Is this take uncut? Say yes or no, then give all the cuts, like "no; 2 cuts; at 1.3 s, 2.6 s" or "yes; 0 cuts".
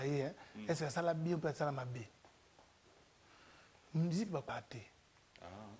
yes; 0 cuts